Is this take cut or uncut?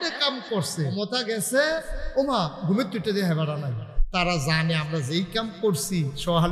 cut